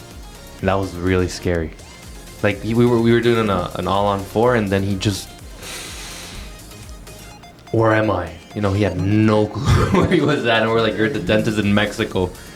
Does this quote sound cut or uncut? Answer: uncut